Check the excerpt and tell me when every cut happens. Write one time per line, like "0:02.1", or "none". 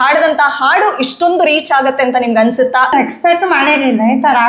0:02.9

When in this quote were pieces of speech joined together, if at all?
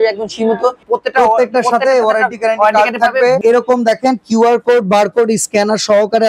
0:00.8
0:03.4

